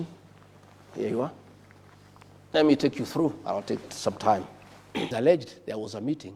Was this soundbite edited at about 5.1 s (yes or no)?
yes